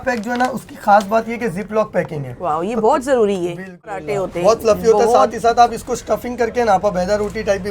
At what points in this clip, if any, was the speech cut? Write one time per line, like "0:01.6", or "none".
0:04.0